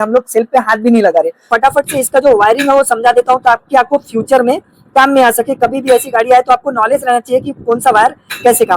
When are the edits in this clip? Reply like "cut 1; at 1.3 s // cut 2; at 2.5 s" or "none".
cut 1; at 1.5 s